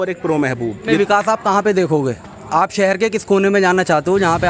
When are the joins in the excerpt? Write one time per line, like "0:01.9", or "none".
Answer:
0:01.0